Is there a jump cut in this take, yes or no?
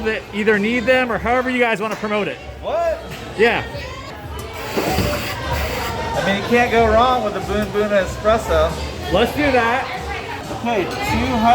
yes